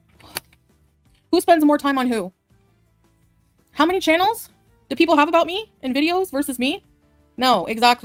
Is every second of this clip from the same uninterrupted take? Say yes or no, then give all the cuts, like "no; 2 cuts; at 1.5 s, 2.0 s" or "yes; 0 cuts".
yes; 0 cuts